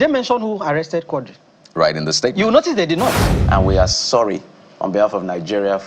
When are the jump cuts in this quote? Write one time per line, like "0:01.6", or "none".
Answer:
0:03.3